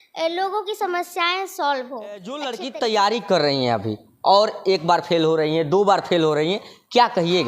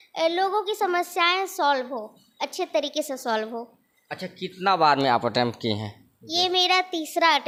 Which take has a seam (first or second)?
first